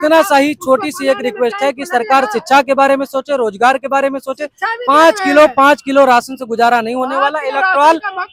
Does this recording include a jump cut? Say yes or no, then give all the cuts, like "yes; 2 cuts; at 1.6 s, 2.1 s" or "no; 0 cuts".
no; 0 cuts